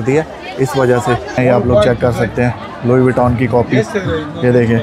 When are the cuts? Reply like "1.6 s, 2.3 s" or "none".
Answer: 1.4 s